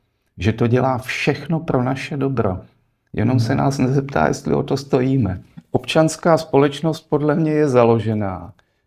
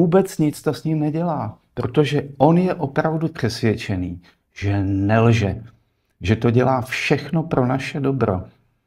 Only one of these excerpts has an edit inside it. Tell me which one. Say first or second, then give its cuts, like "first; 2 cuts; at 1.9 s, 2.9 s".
first; 1 cut; at 5.5 s